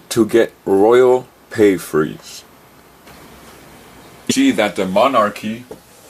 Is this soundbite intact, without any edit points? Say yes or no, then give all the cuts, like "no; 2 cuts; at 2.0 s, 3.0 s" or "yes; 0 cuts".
yes; 0 cuts